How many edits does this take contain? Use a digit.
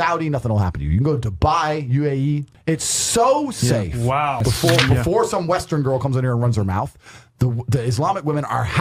2